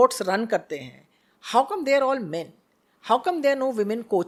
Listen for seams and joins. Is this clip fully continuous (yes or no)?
yes